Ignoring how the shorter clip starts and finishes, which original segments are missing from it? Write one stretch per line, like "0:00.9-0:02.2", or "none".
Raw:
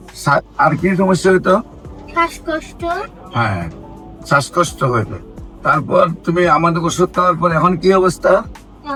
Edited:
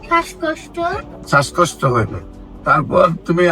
0:03.2-0:04.1